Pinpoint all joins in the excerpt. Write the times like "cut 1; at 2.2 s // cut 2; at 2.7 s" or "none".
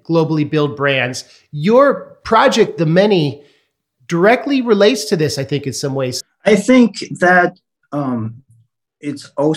cut 1; at 6.2 s